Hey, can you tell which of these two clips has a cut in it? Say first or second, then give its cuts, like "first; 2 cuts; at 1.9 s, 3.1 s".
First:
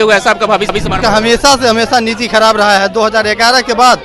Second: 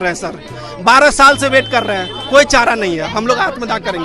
first; 1 cut; at 1.0 s